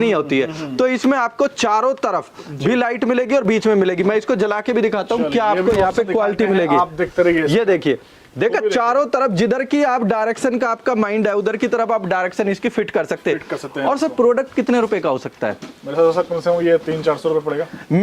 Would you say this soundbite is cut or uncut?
uncut